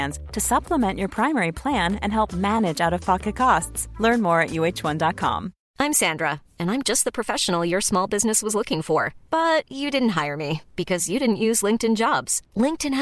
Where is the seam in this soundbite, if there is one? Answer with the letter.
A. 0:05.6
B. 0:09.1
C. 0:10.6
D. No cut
A